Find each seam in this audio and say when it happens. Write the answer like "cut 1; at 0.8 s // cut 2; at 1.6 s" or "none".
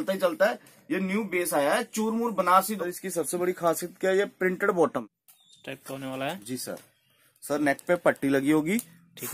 cut 1; at 2.9 s // cut 2; at 5.0 s

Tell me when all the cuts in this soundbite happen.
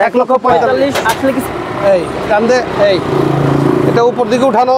cut 1; at 1.4 s

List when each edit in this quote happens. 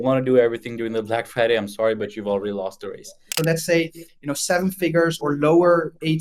cut 1; at 3.3 s

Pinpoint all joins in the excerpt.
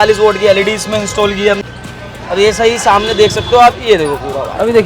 cut 1; at 1.6 s

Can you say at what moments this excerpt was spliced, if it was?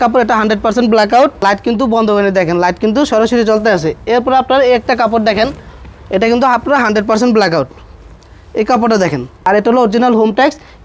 cut 1; at 1.4 s // cut 2; at 9.5 s

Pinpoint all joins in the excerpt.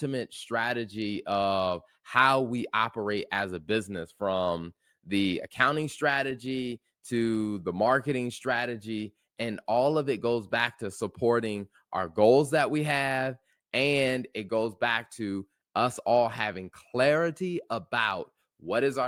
none

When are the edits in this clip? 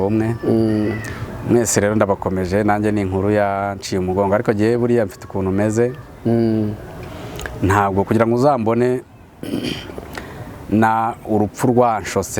none

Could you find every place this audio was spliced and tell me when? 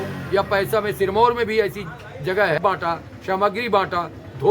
cut 1; at 2.6 s

